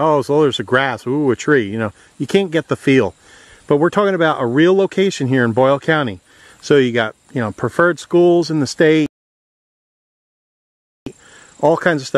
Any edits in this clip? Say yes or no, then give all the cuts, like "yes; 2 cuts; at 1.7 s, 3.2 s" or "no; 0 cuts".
no; 0 cuts